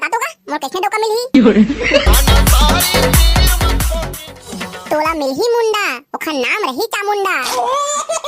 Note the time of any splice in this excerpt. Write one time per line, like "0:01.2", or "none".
0:04.3